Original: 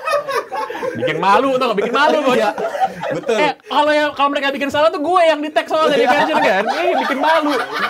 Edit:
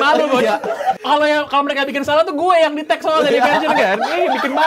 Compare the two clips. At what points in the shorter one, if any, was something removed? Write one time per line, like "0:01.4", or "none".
0:01.0